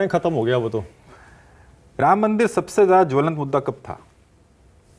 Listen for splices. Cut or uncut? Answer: cut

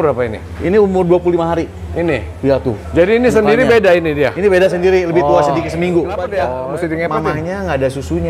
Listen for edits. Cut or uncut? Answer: cut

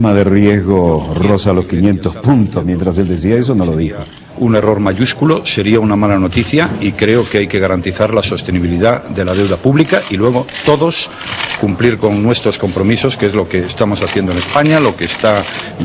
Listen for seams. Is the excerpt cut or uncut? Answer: cut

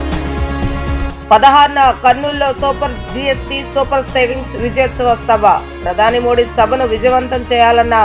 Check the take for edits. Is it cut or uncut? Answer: cut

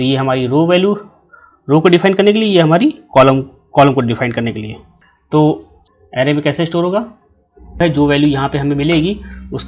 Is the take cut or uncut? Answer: cut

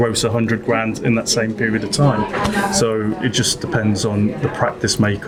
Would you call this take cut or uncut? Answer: uncut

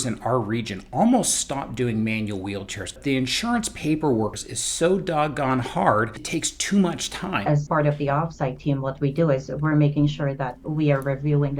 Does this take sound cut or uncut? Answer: cut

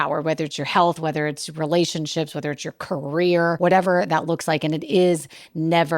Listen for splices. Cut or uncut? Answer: cut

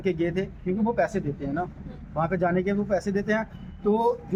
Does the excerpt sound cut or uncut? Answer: uncut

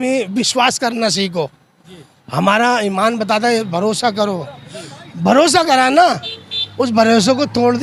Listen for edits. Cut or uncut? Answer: uncut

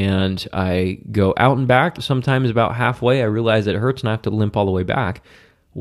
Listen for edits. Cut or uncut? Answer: cut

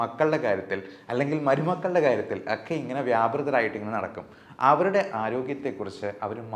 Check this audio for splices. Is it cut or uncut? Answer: uncut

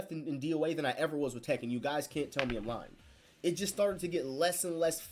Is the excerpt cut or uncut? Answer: uncut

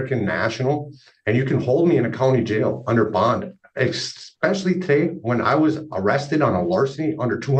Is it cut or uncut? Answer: uncut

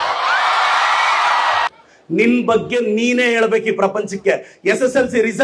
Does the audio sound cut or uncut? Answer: cut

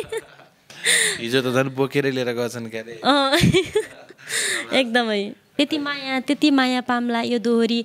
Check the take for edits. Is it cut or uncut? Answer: cut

